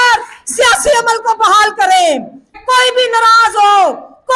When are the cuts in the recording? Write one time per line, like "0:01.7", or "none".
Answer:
0:02.6